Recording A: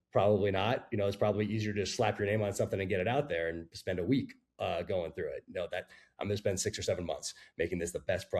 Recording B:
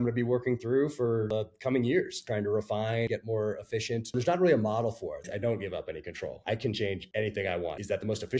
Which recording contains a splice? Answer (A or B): B